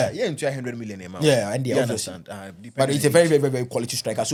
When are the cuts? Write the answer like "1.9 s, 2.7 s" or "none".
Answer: none